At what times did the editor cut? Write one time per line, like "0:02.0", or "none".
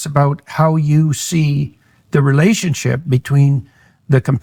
none